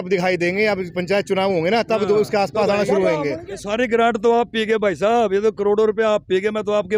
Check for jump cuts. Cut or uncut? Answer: cut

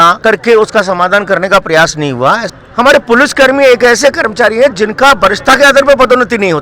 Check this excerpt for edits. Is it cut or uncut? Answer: cut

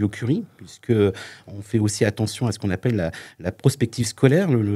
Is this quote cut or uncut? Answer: uncut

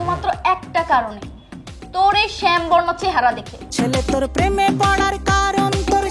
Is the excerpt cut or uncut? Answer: cut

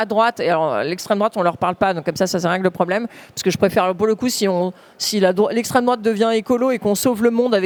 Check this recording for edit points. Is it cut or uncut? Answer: uncut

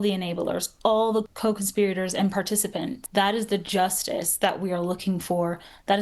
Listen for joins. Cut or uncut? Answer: cut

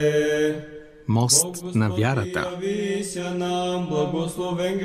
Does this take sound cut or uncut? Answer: uncut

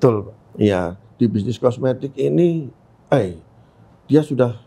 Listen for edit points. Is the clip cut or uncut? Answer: uncut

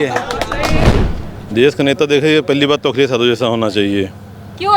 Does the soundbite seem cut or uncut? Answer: cut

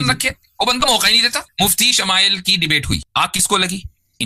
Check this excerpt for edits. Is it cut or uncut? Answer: cut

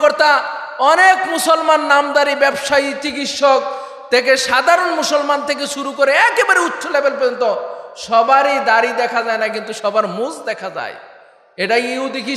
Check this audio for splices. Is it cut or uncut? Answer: uncut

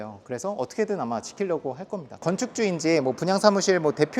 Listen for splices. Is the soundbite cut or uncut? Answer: cut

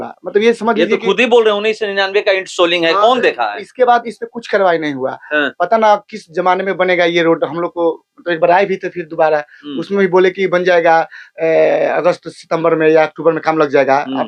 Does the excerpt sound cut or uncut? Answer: uncut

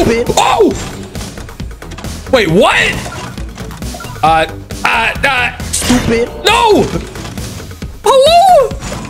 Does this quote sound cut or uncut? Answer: uncut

